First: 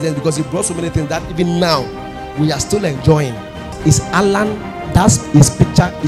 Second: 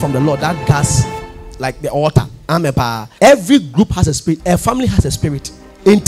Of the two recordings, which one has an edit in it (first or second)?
first